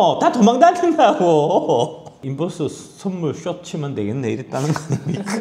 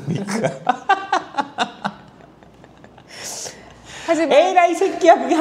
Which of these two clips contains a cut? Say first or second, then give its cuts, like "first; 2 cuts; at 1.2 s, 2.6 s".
first; 1 cut; at 2.2 s